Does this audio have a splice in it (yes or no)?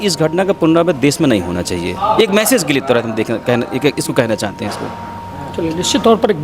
no